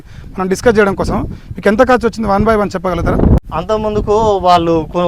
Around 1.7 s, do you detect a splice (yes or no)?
no